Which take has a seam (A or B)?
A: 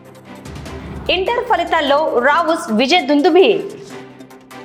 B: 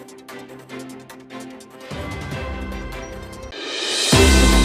B